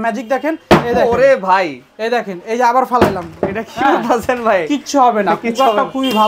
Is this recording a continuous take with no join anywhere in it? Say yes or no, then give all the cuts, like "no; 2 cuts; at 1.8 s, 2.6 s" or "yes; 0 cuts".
yes; 0 cuts